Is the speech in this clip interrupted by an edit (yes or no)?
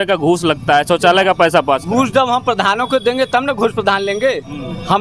no